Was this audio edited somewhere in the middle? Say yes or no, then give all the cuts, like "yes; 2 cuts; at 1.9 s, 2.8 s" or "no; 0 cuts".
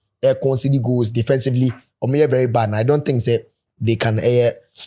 no; 0 cuts